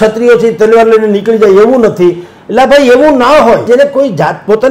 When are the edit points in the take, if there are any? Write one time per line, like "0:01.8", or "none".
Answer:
0:03.7